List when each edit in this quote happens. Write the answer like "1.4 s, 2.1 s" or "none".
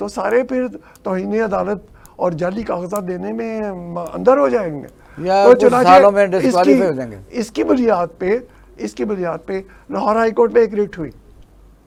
none